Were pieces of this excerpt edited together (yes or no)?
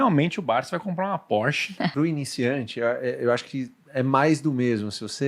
yes